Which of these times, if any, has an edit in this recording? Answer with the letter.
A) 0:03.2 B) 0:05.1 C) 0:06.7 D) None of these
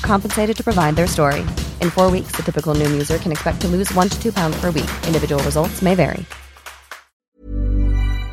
C